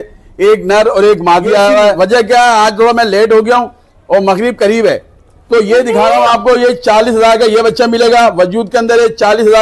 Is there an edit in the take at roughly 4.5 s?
no; 1 cut; at 2.0 s

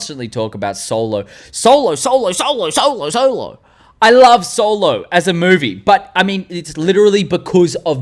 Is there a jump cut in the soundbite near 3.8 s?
no; 0 cuts

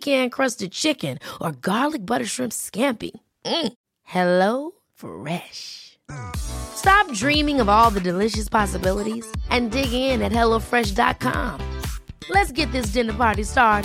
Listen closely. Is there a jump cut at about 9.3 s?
no; 0 cuts

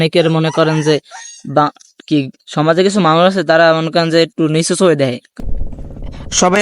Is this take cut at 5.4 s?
yes; 1 cut; at 5.4 s

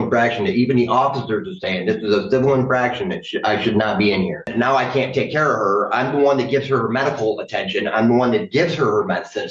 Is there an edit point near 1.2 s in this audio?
no; 1 cut; at 4.5 s

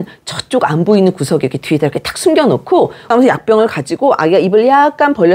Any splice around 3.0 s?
yes; 1 cut; at 3.0 s

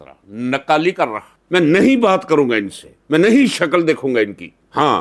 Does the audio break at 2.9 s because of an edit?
no; 1 cut; at 1.3 s

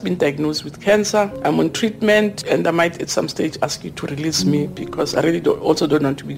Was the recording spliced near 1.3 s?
yes; 2 cuts; at 1.3 s, 2.4 s

